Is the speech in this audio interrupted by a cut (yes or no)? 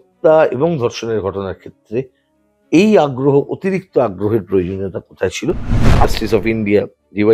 yes